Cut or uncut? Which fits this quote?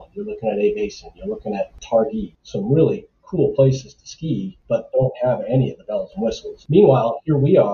cut